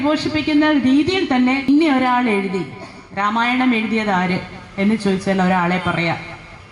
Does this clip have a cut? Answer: yes; 1 cut; at 1.7 s

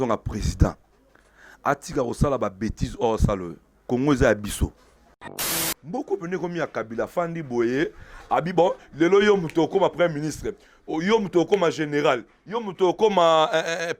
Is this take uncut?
no; 1 cut; at 5.5 s

